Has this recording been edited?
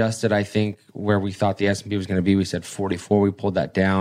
no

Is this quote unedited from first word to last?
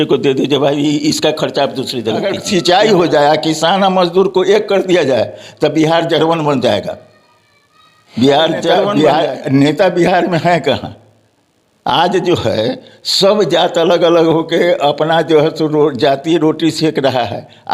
no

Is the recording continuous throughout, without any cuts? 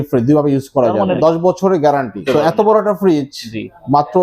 no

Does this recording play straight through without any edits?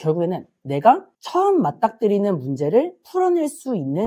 yes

